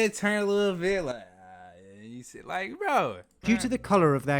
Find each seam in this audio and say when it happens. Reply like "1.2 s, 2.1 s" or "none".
3.3 s